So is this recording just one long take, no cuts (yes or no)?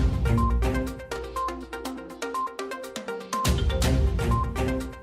no